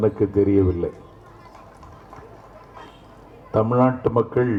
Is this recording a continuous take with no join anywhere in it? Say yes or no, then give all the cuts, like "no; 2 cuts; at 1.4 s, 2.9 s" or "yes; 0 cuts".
yes; 0 cuts